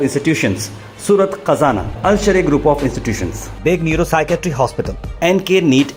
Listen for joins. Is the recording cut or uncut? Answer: uncut